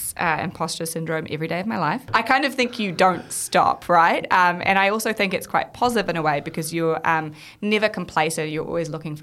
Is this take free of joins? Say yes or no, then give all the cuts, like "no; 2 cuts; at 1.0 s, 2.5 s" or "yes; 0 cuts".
no; 1 cut; at 2.1 s